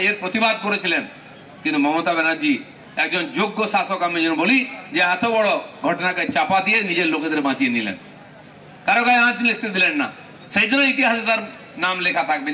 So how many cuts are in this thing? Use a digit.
0